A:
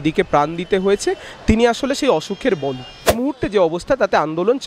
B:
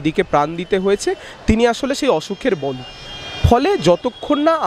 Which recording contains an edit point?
A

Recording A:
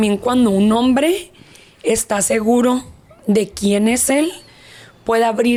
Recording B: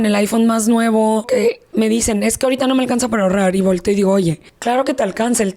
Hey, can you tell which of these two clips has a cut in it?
B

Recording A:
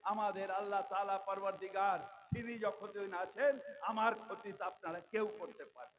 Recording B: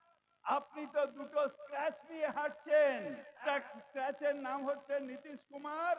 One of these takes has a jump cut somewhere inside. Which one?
B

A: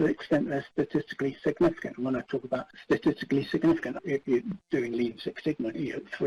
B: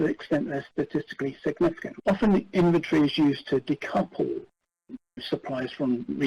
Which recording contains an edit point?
B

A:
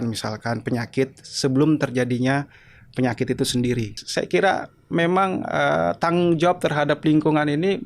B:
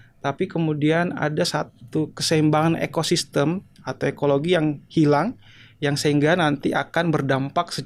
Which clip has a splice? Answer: A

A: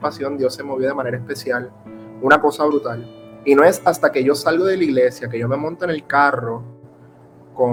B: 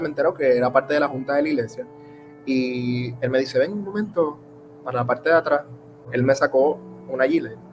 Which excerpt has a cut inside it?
B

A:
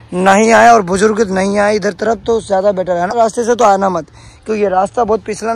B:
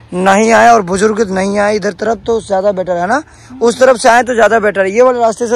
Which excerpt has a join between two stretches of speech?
A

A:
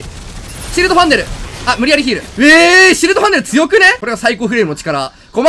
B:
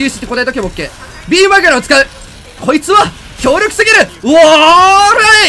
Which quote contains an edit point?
A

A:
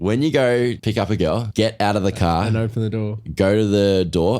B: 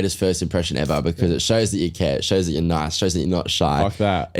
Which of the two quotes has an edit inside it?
A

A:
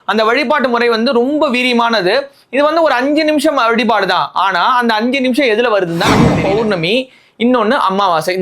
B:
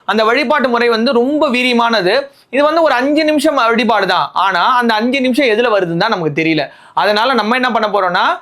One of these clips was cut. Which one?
A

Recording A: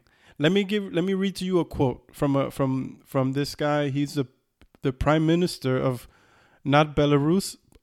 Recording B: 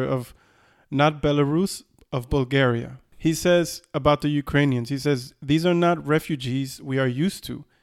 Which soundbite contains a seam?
B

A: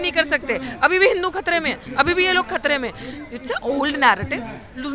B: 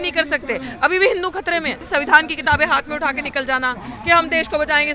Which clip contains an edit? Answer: B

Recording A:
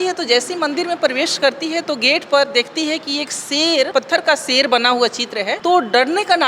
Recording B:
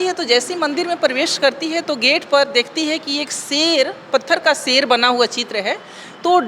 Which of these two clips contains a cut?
A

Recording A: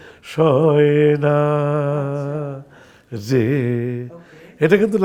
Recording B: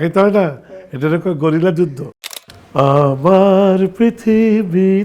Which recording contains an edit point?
B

